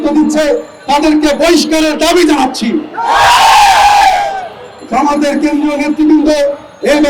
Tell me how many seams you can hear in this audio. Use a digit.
0